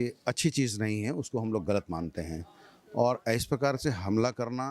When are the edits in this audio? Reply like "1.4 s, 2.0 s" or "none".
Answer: none